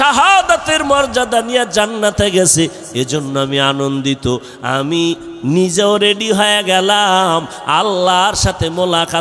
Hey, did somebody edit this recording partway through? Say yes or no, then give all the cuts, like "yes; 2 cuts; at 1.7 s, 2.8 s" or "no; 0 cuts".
no; 0 cuts